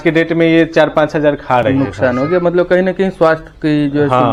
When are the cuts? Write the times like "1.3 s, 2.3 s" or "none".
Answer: none